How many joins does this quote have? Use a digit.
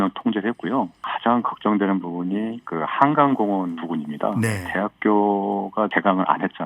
4